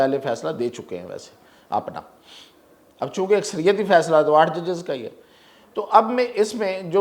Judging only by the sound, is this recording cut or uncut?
uncut